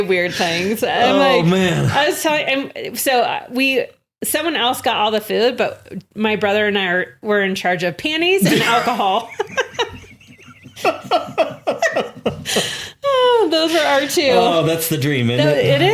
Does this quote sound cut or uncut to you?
uncut